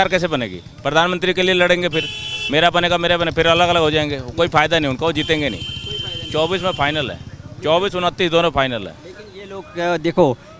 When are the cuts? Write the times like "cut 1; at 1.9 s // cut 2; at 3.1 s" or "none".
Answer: none